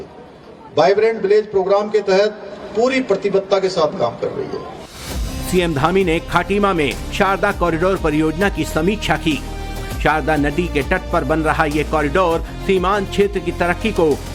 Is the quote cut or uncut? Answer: uncut